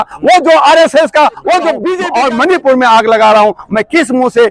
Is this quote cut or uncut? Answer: cut